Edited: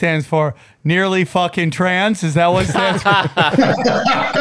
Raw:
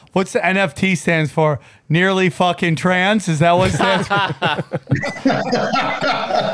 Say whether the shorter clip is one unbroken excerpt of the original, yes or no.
no